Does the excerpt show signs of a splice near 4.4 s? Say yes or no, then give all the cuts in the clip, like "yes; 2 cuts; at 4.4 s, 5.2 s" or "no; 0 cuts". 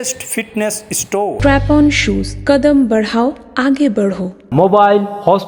no; 0 cuts